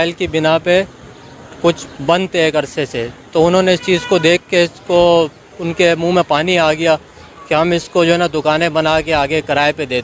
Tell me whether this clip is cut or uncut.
uncut